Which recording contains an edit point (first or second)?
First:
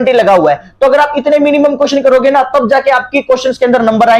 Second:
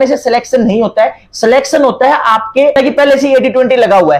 second